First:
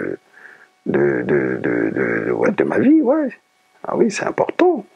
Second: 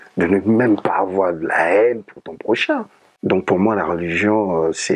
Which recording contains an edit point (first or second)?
second